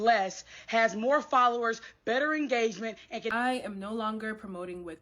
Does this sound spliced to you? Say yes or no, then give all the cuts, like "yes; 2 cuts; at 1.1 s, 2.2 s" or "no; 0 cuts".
yes; 1 cut; at 3.3 s